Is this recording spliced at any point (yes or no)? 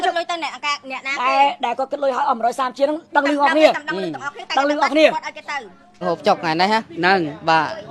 yes